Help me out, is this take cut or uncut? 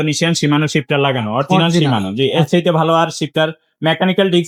uncut